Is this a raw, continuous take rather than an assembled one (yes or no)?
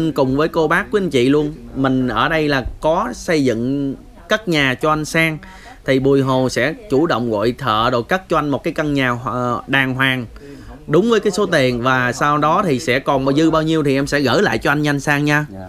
yes